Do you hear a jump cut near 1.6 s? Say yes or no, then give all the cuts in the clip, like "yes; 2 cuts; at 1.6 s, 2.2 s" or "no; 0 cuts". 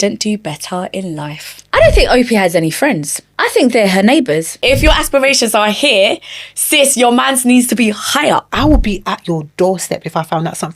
yes; 3 cuts; at 1.6 s, 4.6 s, 8.5 s